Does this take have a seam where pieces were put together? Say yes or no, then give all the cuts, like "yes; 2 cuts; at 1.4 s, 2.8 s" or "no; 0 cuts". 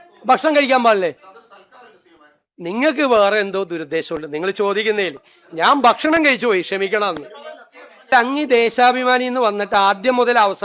yes; 1 cut; at 8.1 s